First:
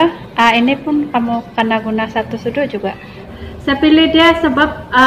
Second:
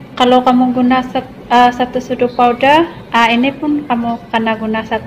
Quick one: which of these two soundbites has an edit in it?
first; 1 cut; at 3.3 s

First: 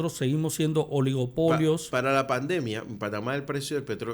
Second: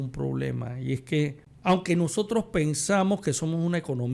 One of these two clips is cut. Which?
second; 1 cut; at 1.5 s

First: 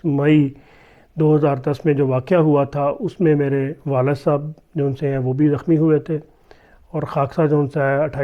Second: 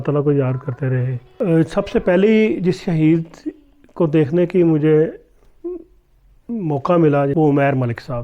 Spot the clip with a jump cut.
second; 2 cuts; at 1.2 s, 7.3 s

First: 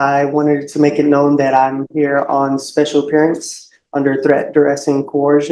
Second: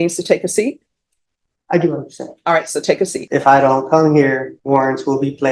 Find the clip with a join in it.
second; 2 cuts; at 3.2 s, 4.5 s

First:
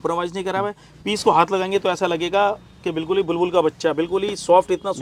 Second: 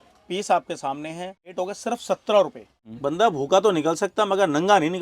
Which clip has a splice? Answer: second; 2 cuts; at 1.5 s, 2.7 s

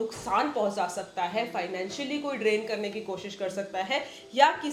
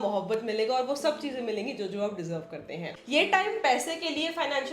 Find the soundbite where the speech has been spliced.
second; 1 cut; at 3.0 s

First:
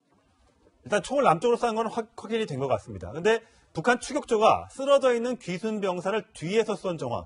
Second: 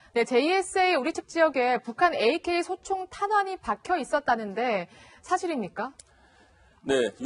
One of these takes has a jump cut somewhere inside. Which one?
first; 1 cut; at 3.6 s

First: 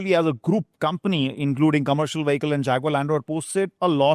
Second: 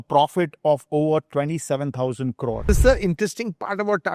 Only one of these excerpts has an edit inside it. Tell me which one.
second; 1 cut; at 2.6 s

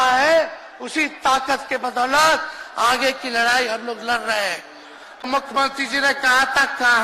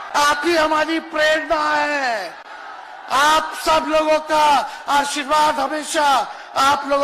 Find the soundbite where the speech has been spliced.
first; 1 cut; at 5.1 s

